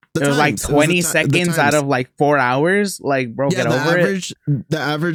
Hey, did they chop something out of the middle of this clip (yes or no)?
no